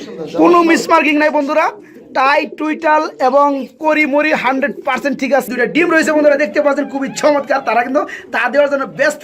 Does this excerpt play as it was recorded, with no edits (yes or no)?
no